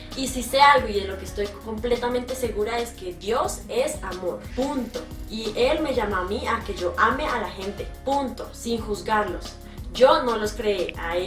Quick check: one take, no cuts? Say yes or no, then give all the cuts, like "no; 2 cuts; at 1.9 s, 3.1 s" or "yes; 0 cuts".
no; 1 cut; at 2.0 s